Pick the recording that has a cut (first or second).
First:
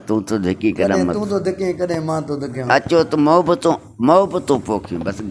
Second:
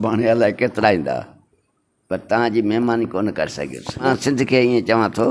second